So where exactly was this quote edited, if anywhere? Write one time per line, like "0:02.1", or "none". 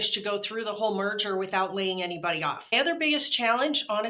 0:02.7